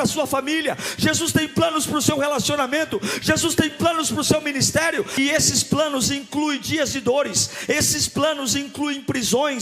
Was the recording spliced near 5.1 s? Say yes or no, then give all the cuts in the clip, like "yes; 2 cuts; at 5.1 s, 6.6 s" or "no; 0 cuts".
yes; 1 cut; at 5.1 s